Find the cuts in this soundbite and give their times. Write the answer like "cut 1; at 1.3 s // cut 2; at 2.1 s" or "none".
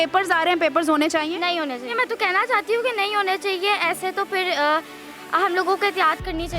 cut 1; at 1.9 s